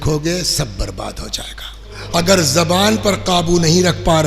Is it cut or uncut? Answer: cut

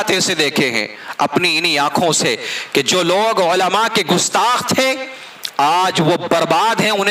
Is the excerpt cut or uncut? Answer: uncut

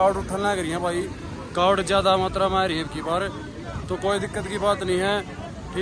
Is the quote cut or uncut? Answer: uncut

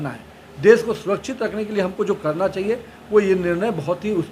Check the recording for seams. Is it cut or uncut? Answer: uncut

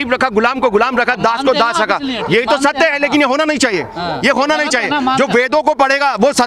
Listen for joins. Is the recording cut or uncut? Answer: uncut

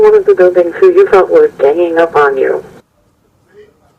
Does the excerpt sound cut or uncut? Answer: cut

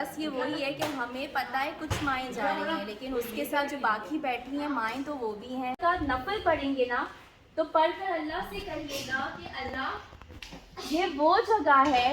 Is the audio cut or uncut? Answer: cut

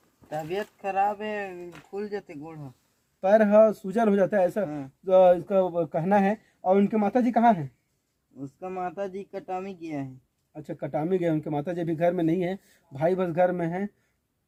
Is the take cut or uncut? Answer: uncut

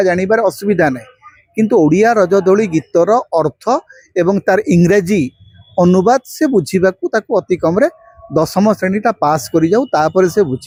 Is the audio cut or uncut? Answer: uncut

